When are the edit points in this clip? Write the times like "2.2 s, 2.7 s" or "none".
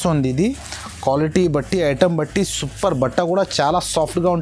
none